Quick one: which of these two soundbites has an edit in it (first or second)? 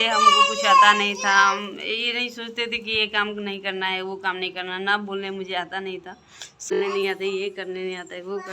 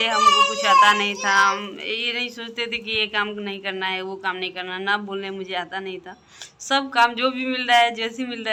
first